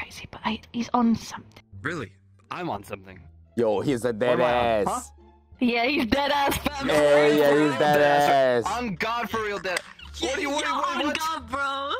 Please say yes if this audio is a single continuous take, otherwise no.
yes